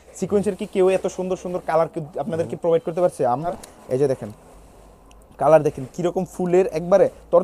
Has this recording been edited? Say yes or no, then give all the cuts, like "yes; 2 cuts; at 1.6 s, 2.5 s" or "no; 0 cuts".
yes; 1 cut; at 3.4 s